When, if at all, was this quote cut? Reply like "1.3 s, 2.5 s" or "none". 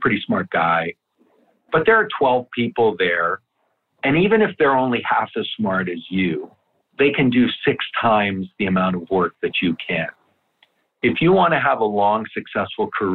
1.0 s